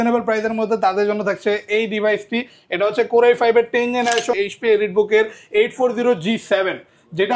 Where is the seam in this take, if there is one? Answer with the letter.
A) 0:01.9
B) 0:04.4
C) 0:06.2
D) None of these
B